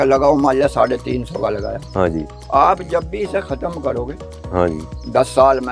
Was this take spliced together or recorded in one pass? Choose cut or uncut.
uncut